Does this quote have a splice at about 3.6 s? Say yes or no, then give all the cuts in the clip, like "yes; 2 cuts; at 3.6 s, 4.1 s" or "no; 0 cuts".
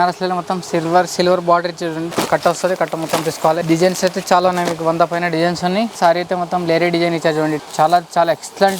yes; 4 cuts; at 2.1 s, 3.6 s, 5.9 s, 7.6 s